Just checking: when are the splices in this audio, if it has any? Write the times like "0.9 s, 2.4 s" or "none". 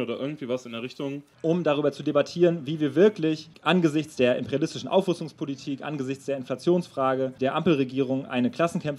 1.3 s, 3.5 s, 7.3 s